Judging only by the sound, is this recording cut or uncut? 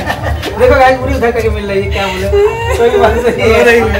uncut